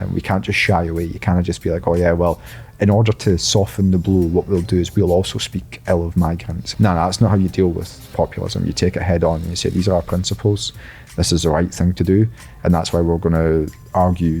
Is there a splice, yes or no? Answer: yes